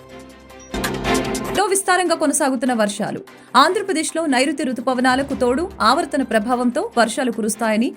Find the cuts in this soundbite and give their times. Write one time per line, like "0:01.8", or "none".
0:00.7
0:01.6